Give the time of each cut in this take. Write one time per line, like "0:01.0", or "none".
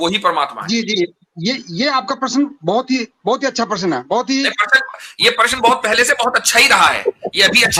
none

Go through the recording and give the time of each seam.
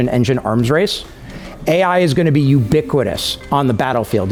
none

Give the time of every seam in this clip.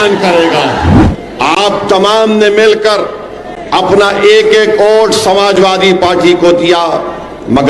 0:00.9

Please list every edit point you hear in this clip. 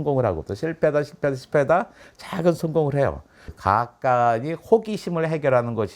0:03.5

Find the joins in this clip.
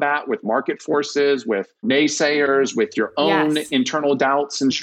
0:01.8

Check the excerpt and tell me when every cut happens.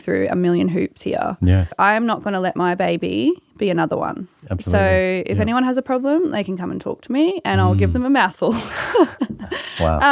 0:01.7

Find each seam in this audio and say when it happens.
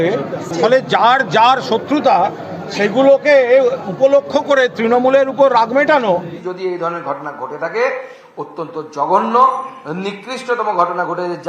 0:06.2

